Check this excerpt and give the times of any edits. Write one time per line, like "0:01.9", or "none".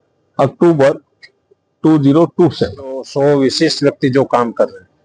0:03.1